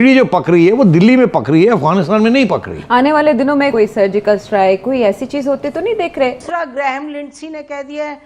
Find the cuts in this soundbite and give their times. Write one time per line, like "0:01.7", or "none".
0:03.7
0:06.4